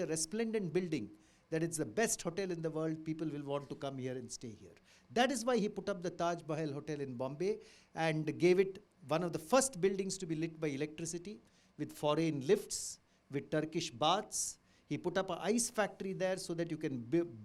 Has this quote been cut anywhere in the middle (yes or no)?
no